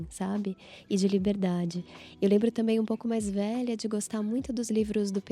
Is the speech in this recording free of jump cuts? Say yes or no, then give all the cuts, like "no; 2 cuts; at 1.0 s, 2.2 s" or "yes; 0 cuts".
yes; 0 cuts